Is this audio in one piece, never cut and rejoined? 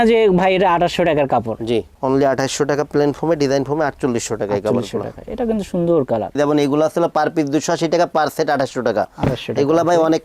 no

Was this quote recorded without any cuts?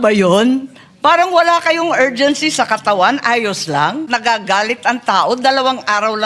no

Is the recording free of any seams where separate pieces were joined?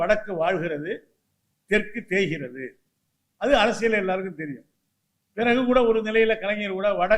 yes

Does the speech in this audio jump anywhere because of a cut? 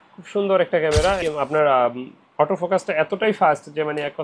yes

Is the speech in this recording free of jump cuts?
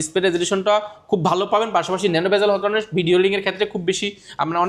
yes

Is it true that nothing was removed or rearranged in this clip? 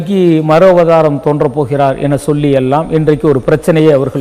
yes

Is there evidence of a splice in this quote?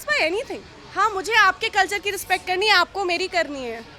no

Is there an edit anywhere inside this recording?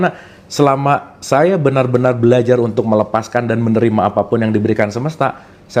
no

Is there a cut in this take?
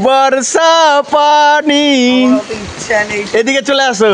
no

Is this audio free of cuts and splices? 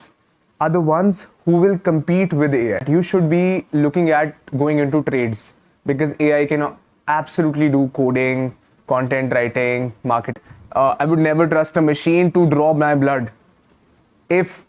no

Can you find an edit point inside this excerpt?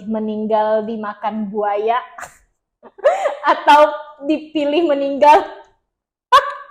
no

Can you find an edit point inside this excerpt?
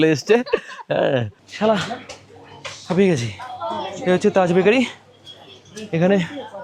yes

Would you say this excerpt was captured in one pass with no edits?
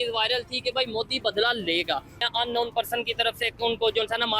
no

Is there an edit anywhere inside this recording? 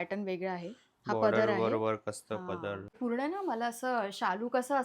yes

